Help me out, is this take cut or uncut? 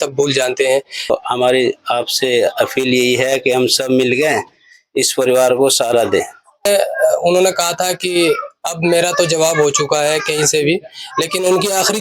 cut